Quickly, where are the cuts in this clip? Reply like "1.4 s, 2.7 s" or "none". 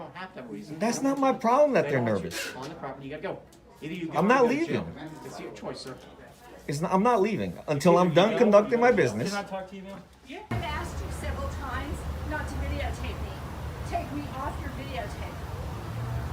10.5 s